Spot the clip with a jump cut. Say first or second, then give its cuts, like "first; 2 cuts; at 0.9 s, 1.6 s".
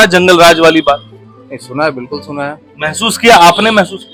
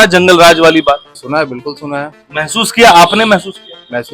second; 1 cut; at 1.1 s